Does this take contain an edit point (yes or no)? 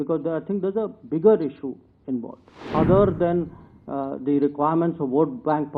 yes